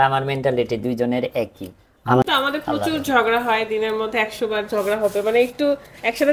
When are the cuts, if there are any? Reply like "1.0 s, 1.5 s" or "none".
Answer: 2.2 s